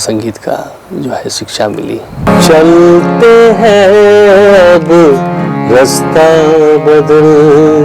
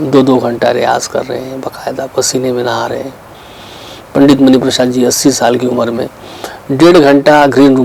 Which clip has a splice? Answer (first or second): first